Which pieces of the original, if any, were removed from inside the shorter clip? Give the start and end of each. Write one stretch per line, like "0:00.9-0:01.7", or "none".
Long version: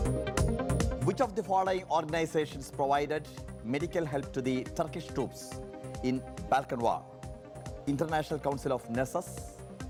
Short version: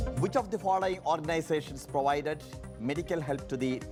none